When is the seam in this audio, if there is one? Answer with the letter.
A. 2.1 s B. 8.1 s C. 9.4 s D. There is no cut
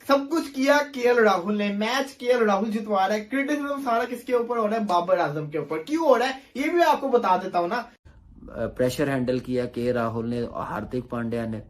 B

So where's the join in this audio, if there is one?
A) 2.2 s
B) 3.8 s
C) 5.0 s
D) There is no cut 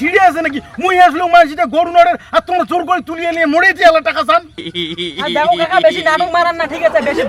D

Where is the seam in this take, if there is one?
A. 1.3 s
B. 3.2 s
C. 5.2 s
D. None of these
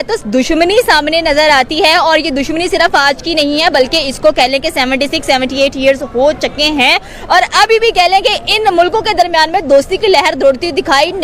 D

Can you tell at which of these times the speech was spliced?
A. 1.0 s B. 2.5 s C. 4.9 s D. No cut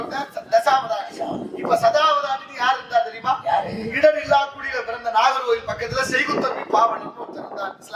D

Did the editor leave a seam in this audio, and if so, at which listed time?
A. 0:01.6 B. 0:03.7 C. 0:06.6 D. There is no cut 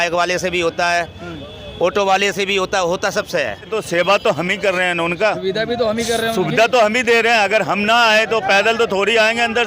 B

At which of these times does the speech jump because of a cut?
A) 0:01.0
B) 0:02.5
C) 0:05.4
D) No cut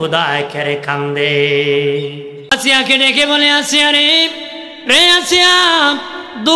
B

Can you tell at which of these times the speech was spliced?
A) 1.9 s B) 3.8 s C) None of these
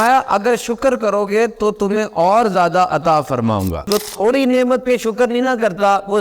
B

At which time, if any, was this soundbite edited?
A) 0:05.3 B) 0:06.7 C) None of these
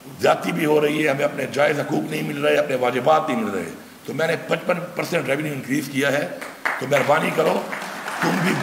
C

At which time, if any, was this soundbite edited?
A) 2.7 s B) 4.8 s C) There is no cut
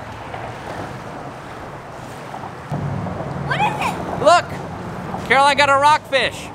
A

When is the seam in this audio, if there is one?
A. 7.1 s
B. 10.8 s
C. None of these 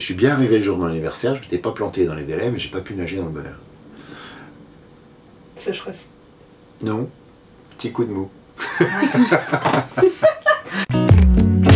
B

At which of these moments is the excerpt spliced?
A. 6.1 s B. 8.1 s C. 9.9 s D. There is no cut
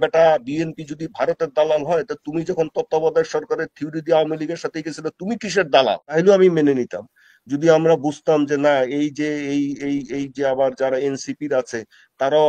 A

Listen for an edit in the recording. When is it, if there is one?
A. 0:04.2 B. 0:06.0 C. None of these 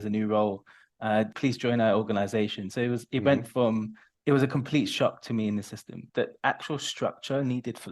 B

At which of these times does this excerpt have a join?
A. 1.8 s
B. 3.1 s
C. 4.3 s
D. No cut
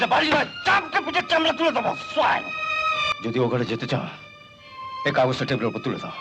B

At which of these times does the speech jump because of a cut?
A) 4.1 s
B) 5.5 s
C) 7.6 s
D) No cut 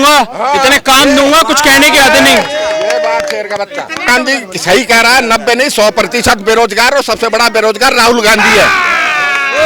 A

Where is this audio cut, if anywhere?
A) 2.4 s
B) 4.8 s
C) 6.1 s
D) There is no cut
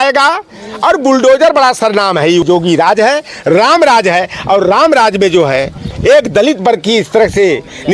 A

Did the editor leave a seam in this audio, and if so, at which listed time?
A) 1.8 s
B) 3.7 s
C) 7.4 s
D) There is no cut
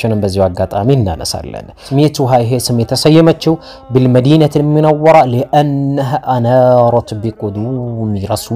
A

